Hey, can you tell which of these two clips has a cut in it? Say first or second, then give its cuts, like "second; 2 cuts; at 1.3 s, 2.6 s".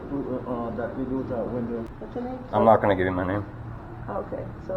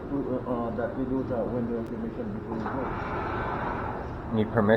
first; 1 cut; at 1.9 s